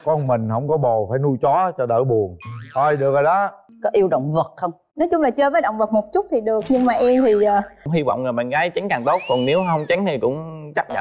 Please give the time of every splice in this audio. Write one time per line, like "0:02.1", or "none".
0:03.6
0:07.8